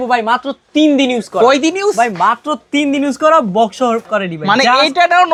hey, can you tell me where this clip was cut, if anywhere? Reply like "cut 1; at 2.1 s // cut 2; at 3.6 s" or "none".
none